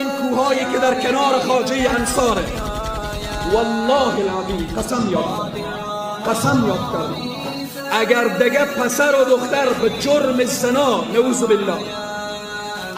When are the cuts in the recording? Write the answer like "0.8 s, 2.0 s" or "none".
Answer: none